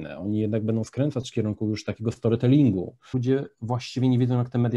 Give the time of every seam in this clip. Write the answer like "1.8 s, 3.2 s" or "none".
3.1 s